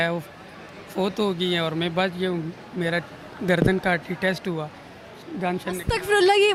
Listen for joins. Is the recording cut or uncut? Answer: uncut